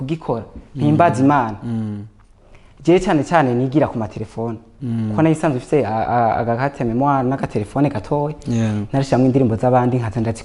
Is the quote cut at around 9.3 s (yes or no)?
no